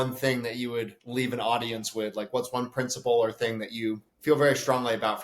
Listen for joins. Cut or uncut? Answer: cut